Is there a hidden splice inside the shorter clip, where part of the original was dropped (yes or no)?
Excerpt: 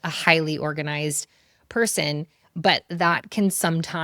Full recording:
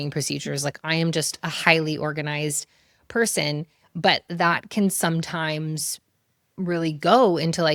no